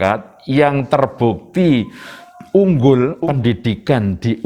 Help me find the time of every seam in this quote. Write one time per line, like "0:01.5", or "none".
0:03.2